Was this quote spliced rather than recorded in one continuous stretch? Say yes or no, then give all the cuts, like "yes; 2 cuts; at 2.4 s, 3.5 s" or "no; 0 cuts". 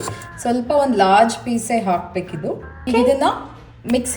yes; 1 cut; at 2.8 s